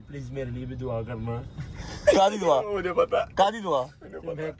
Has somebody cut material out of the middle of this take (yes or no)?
no